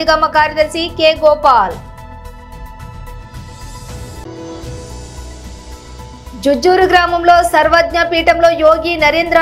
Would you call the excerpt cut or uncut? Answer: uncut